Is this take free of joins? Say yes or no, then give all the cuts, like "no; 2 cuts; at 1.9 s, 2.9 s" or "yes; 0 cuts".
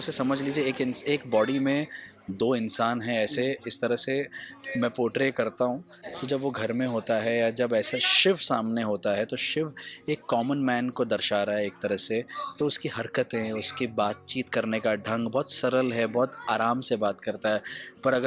yes; 0 cuts